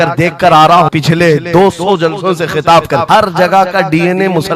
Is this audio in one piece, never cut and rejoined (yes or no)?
no